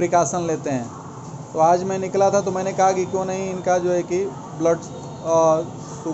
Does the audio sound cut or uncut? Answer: uncut